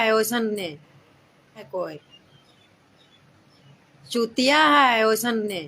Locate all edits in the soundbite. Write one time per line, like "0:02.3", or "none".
0:01.7